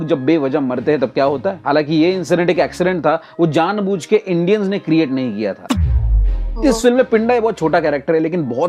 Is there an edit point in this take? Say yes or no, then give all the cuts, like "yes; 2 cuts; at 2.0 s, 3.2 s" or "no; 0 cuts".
no; 0 cuts